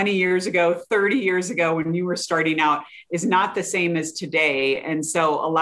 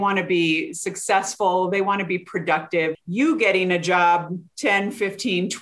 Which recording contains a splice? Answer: second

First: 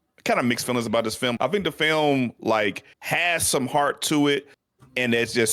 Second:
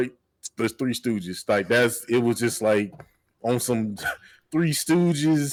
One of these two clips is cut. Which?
first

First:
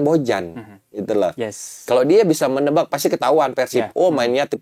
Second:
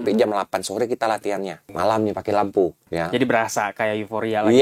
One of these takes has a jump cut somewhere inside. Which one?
second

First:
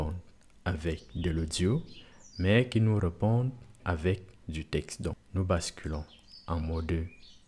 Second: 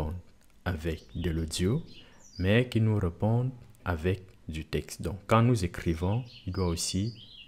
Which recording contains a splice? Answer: first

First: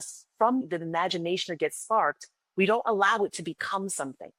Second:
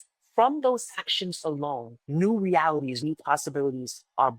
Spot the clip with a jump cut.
second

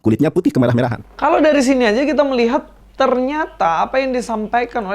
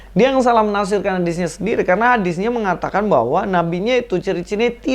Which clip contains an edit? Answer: first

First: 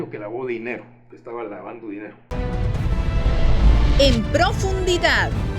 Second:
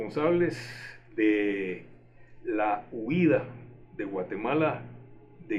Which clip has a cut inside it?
first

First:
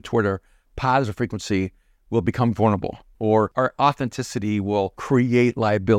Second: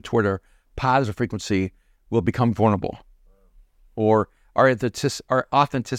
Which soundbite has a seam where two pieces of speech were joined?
first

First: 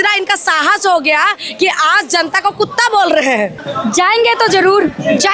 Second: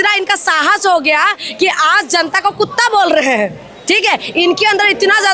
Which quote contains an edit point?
first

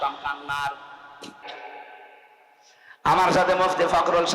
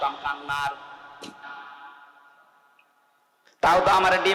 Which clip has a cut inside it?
first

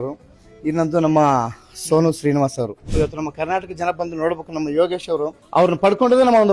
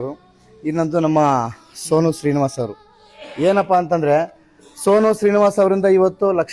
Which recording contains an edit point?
first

